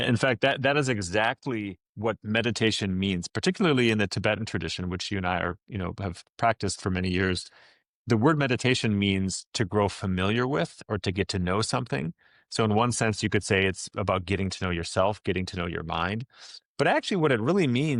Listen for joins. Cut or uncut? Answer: uncut